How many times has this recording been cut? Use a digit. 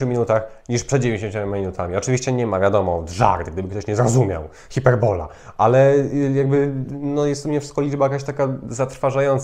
0